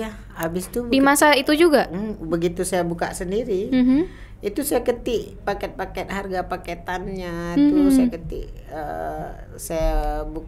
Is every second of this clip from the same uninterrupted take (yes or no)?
yes